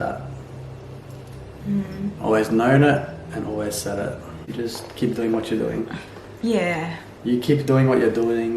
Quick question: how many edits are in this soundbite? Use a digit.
1